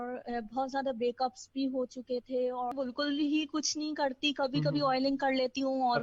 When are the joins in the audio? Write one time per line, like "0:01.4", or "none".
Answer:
0:02.7